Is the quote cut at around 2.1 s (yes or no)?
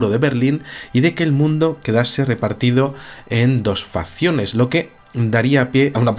no